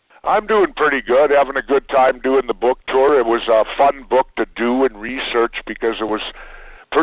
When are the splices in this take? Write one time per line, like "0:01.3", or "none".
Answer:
none